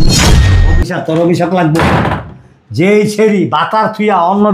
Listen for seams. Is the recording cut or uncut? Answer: cut